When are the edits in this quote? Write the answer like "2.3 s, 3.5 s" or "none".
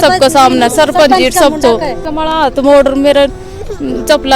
2.0 s